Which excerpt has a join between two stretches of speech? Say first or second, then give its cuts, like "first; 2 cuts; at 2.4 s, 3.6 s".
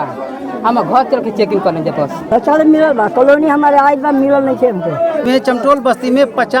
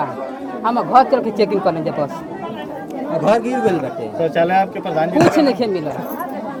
first; 2 cuts; at 2.2 s, 5.2 s